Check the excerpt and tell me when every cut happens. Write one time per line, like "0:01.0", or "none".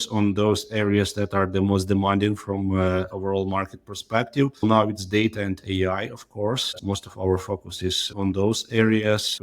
0:04.6
0:06.8